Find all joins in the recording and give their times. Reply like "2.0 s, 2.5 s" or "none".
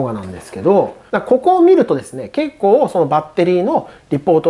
1.0 s